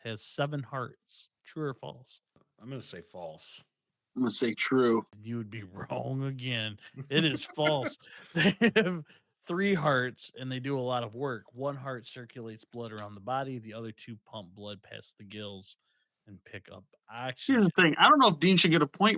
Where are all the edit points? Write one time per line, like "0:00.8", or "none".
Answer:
0:02.5
0:05.2